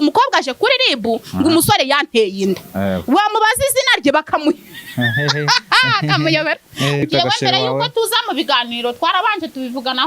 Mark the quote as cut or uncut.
cut